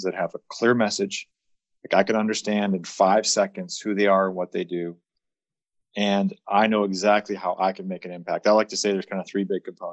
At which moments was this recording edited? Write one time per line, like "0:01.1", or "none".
none